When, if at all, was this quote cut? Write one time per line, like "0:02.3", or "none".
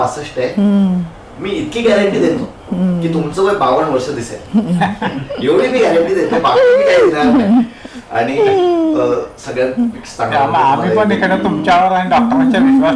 none